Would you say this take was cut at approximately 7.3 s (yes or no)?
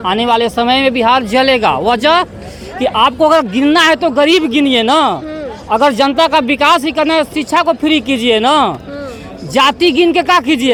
no